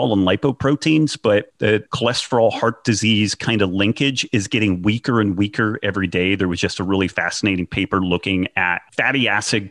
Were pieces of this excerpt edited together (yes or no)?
yes